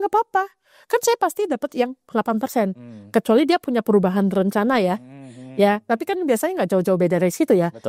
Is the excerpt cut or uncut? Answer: uncut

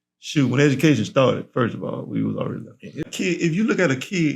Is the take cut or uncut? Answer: cut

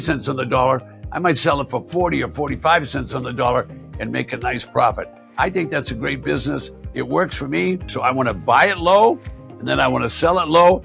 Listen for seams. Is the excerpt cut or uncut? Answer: cut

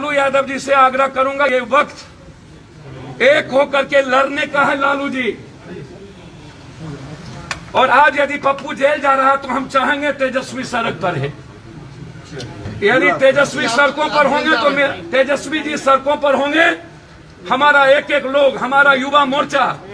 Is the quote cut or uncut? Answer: cut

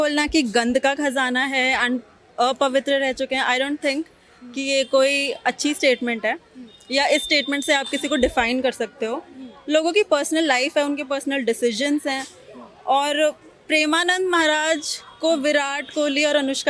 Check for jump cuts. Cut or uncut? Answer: uncut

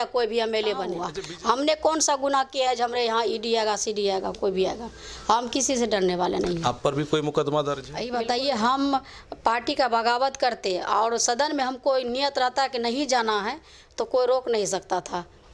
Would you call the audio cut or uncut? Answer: cut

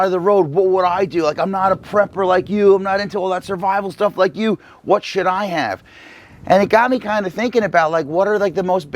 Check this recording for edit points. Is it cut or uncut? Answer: uncut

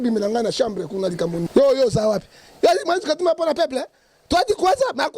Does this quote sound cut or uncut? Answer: cut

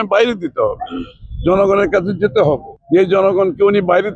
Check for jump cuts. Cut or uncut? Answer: cut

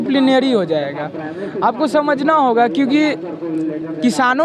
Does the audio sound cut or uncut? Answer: uncut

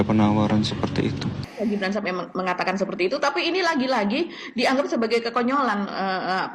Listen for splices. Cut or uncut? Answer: cut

